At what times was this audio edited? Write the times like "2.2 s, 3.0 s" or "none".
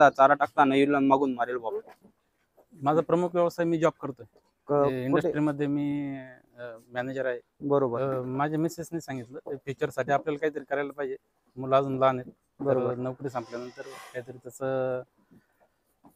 1.6 s, 8.0 s